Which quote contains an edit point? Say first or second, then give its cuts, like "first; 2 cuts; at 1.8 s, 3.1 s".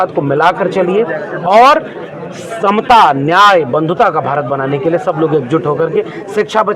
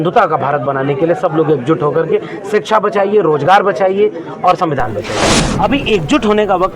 second; 1 cut; at 5.2 s